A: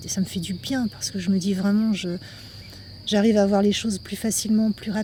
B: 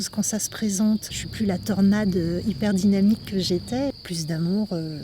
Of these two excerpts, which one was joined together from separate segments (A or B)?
B